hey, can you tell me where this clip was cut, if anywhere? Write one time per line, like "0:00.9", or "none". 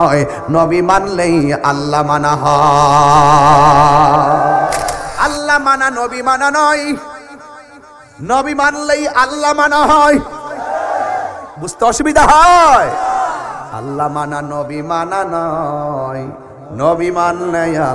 0:05.1